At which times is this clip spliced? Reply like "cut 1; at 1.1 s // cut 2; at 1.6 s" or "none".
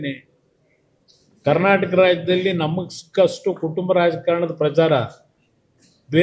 none